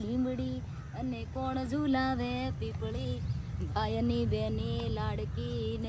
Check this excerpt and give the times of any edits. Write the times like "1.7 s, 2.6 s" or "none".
none